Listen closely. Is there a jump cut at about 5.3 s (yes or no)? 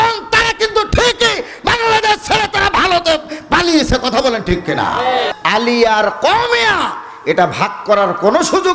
yes